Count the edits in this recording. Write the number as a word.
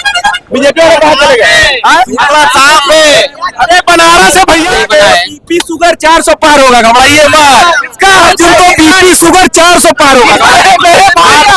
one